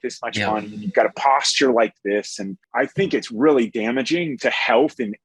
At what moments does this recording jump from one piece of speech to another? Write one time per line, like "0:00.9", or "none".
0:02.6
0:04.4